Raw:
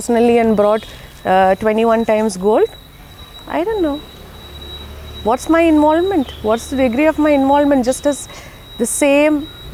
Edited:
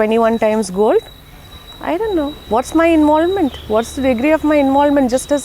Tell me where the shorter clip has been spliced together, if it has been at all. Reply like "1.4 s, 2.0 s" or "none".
2.4 s